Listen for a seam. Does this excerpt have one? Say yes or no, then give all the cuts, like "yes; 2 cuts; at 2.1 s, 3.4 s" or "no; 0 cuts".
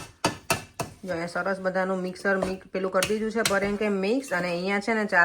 no; 0 cuts